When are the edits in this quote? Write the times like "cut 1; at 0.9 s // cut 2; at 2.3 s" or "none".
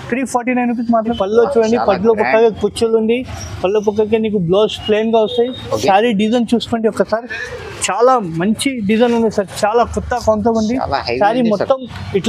cut 1; at 1.1 s